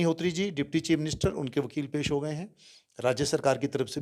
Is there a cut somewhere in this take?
no; 0 cuts

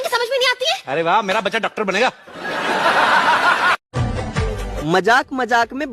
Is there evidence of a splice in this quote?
yes; 1 cut; at 3.9 s

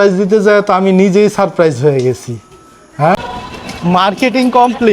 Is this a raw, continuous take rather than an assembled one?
no; 1 cut; at 3.2 s

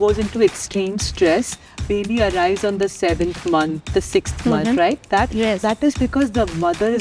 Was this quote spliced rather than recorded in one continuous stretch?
no; 0 cuts

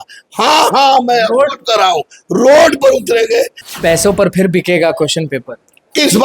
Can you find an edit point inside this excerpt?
yes; 1 cut; at 3.6 s

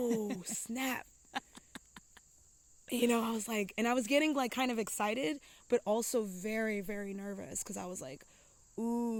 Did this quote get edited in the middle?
no; 0 cuts

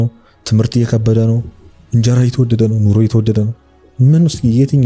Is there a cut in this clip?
no; 0 cuts

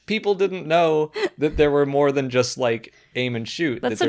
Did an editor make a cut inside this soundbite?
no; 0 cuts

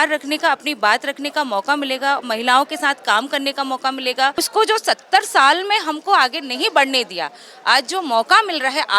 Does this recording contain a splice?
yes; 1 cut; at 4.4 s

